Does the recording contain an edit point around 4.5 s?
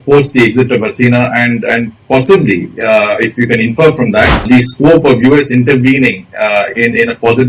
yes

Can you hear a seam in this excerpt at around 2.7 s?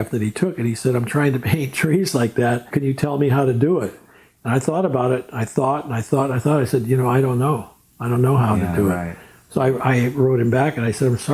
yes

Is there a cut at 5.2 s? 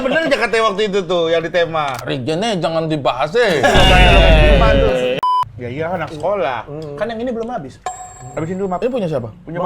yes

